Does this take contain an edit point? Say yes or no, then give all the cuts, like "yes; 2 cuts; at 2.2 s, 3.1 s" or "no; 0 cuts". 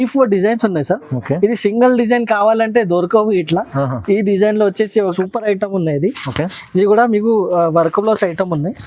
yes; 1 cut; at 5.1 s